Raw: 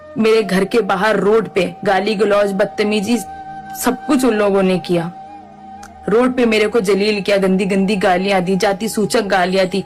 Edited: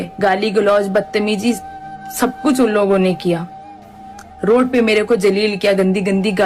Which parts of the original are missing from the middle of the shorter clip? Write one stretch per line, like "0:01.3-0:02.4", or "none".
none